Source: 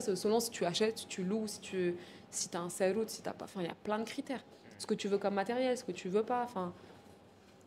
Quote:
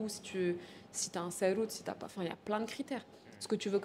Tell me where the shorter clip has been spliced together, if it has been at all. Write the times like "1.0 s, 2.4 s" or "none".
none

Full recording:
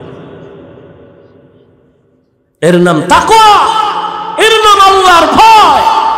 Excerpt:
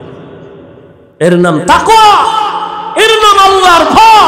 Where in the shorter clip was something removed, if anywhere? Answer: 1.0 s

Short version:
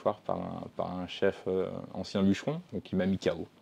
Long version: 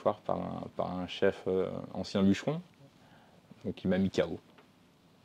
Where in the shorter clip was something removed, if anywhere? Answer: 2.6 s

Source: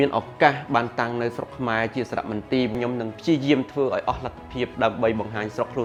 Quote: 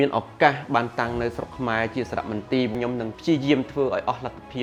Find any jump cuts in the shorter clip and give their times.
none

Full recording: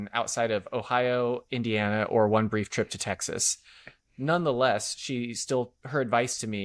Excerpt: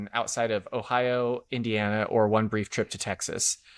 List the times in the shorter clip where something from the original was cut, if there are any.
none

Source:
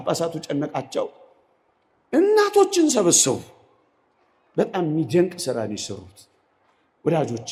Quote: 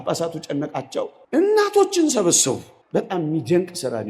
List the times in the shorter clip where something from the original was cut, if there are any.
1.2 s, 2.7 s

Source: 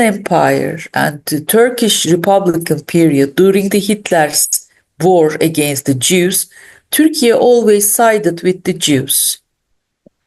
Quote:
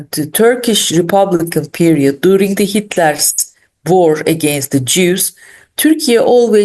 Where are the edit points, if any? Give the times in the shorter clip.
none

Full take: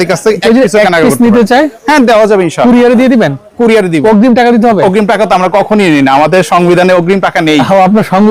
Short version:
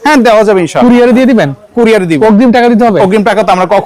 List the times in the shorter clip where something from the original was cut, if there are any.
none

